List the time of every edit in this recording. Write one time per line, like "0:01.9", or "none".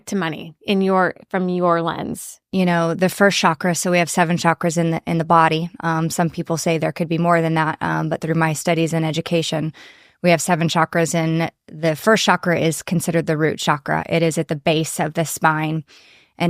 0:02.4